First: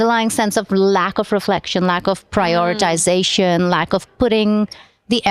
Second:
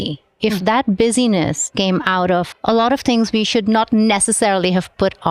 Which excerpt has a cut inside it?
second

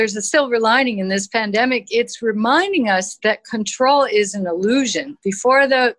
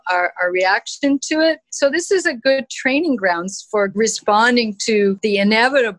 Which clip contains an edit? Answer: second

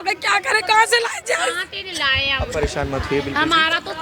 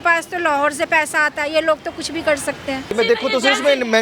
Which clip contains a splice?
second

